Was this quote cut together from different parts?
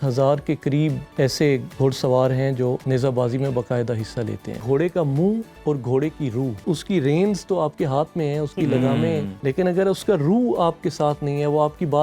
yes; 6 cuts; at 1.0 s, 2.8 s, 4.6 s, 5.5 s, 6.6 s, 9.3 s

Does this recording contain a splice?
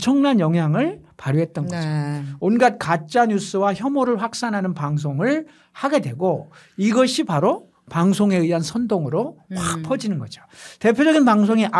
no; 0 cuts

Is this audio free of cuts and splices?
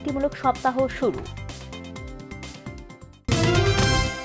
no; 1 cut; at 3.3 s

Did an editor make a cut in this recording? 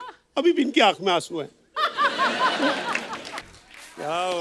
yes; 1 cut; at 3.4 s

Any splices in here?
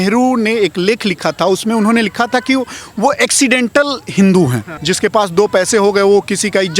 yes; 1 cut; at 4.8 s

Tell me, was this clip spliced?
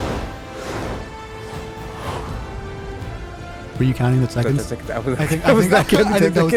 no; 0 cuts

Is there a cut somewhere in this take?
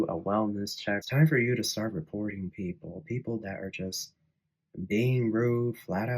yes; 1 cut; at 1.0 s

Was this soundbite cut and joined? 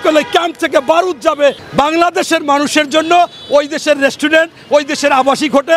yes; 1 cut; at 1.6 s

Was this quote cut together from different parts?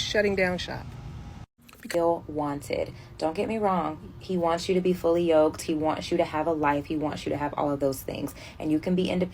yes; 1 cut; at 1.9 s

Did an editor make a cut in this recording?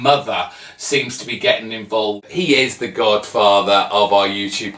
yes; 1 cut; at 2.2 s

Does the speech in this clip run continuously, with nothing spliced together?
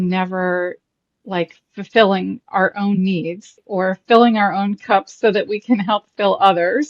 no; 1 cut; at 3.6 s

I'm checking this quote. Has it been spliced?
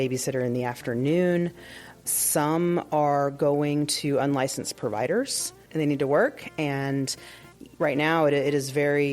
yes; 1 cut; at 5.6 s

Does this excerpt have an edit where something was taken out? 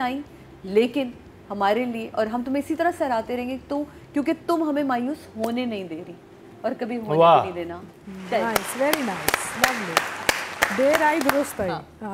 no; 0 cuts

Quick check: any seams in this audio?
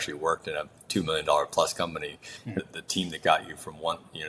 yes; 1 cut; at 2.6 s

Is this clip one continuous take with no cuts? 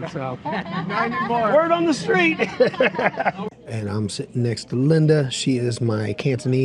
no; 1 cut; at 3.5 s

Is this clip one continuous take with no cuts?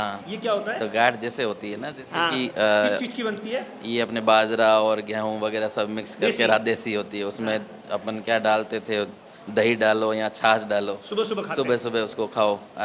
yes; 0 cuts

